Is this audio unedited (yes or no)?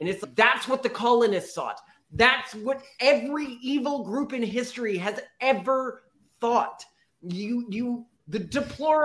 yes